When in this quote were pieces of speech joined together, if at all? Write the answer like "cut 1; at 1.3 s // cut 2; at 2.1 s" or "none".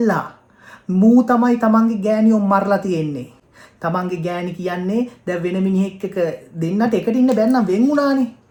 none